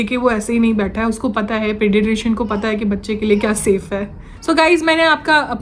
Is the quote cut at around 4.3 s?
no; 0 cuts

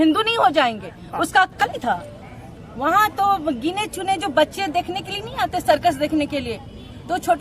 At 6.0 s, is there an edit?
no; 1 cut; at 1.5 s

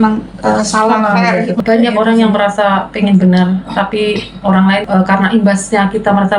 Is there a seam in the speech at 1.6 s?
yes; 2 cuts; at 1.6 s, 4.8 s

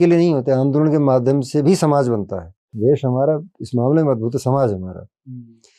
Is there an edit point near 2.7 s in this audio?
yes; 1 cut; at 2.7 s

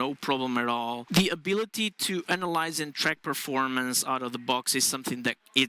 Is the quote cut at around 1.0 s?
yes; 1 cut; at 1.0 s

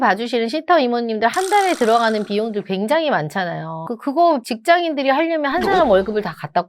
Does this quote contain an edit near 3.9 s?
yes; 1 cut; at 3.9 s

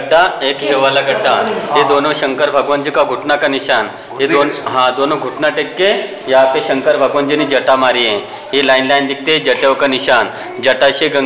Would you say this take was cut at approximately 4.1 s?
no; 0 cuts

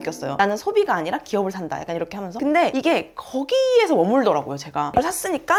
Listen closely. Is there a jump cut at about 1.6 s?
no; 0 cuts

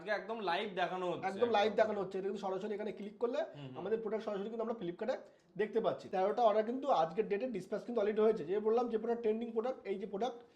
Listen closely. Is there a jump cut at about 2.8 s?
no; 1 cut; at 6.0 s

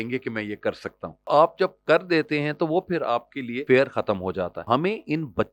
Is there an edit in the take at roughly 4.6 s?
yes; 3 cuts; at 1.3 s, 3.6 s, 4.6 s

